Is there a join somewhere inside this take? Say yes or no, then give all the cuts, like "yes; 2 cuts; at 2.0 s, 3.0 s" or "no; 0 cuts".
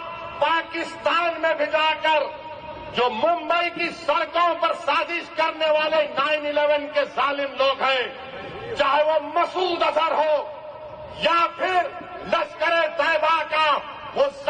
no; 0 cuts